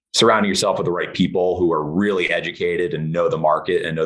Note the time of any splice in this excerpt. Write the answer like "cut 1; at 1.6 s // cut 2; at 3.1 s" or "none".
none